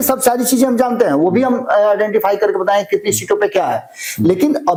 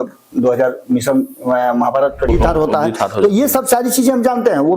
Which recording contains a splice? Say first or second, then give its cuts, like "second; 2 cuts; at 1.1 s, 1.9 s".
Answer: second; 1 cut; at 2.3 s